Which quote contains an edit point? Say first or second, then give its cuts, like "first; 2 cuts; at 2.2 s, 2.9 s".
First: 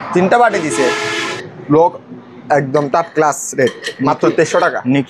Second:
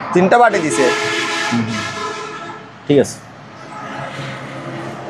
first; 1 cut; at 1.3 s